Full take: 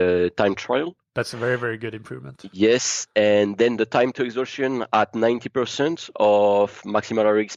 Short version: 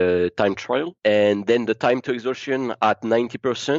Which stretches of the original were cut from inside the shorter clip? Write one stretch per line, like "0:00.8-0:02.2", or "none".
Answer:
0:00.9-0:03.0